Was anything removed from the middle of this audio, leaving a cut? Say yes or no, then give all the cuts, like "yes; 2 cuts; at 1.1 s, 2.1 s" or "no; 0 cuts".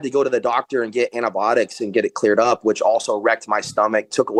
no; 0 cuts